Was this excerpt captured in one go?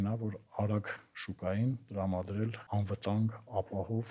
no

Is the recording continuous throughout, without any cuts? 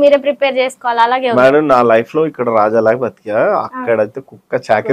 yes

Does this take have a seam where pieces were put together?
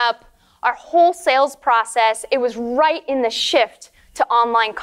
no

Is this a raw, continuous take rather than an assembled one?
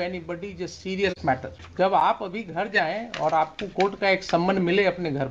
no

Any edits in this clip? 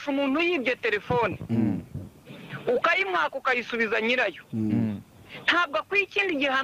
no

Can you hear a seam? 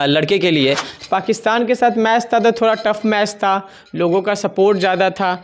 yes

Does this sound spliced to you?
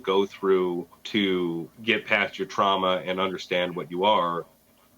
yes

